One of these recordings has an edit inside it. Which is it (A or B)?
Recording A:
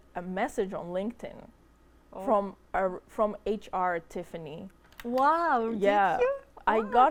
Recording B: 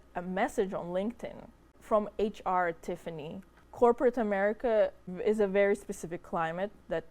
B